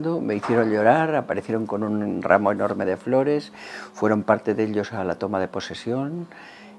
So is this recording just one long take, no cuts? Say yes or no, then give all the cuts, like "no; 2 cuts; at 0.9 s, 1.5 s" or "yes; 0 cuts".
yes; 0 cuts